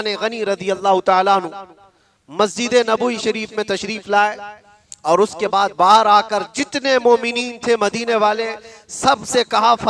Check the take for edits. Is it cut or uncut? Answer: uncut